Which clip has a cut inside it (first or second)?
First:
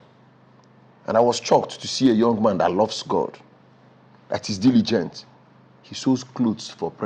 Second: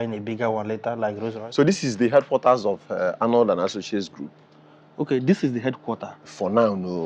second